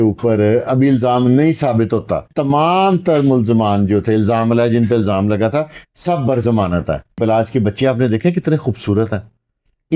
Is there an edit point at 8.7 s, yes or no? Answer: no